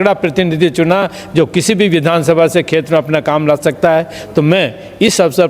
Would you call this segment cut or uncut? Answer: uncut